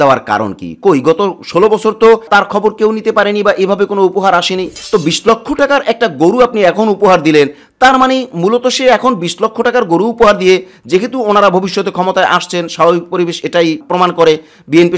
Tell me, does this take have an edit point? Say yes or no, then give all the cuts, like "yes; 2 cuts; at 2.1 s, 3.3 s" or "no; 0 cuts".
yes; 1 cut; at 4.7 s